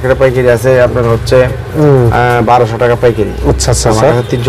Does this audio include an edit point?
no; 0 cuts

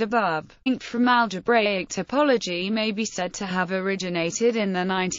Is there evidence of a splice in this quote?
no; 0 cuts

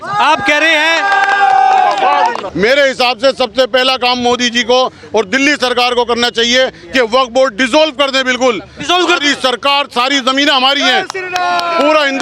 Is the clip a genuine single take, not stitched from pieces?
no; 1 cut; at 2.4 s

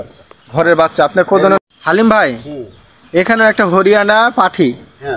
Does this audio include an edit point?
yes; 1 cut; at 1.6 s

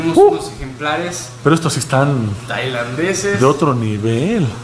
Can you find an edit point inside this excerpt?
no; 0 cuts

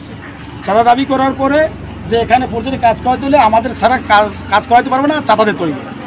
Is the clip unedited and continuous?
yes; 0 cuts

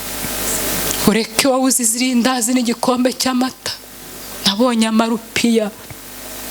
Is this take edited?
no; 0 cuts

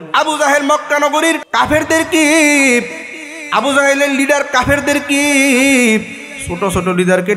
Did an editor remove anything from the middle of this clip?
yes; 1 cut; at 1.4 s

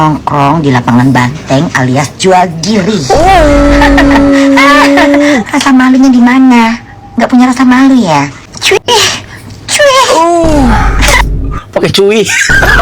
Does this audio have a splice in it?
yes; 1 cut; at 8.5 s

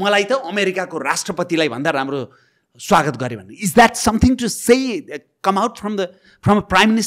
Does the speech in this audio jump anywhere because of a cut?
no; 0 cuts

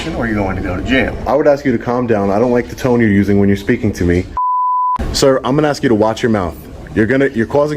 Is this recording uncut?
no; 2 cuts; at 1.3 s, 4.6 s

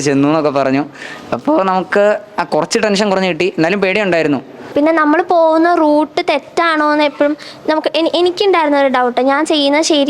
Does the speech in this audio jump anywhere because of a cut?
yes; 1 cut; at 4.7 s

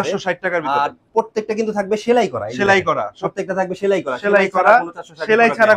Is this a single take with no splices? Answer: yes; 0 cuts

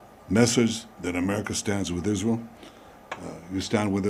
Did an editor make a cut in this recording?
no; 0 cuts

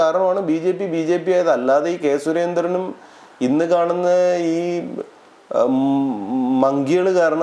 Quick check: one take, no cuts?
yes; 0 cuts

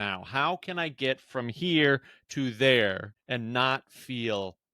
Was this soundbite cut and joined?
yes; 1 cut; at 3.1 s

